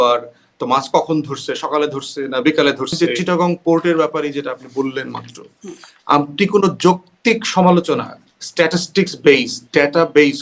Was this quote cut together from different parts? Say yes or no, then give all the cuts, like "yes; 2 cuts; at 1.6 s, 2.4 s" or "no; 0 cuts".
yes; 1 cut; at 3.0 s